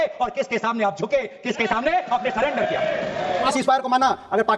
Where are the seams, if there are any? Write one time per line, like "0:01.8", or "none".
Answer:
0:03.5